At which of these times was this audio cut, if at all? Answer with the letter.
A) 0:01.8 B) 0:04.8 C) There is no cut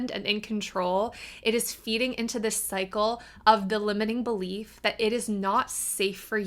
C